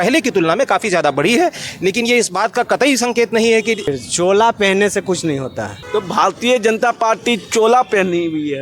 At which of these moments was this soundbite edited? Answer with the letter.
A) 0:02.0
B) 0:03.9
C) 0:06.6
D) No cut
B